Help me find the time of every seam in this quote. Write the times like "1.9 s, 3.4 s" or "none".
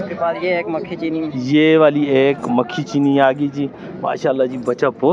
none